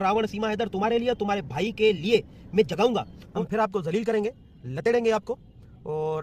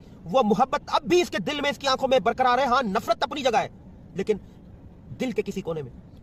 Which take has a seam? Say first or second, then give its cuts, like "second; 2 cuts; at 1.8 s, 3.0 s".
first; 1 cut; at 3.2 s